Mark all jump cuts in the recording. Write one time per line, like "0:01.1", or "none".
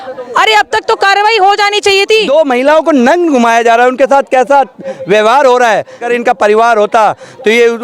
0:02.3
0:06.1